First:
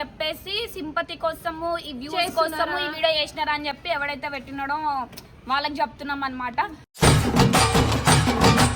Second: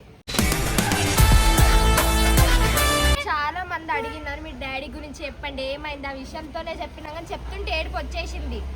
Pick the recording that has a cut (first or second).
second